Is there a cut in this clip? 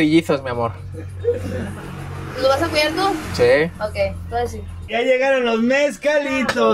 yes; 1 cut; at 4.9 s

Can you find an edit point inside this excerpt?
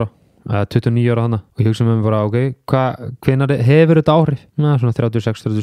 yes; 2 cuts; at 1.5 s, 4.4 s

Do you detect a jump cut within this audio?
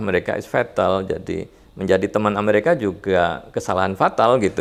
no; 0 cuts

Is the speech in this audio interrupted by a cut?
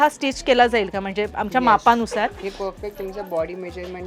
no; 0 cuts

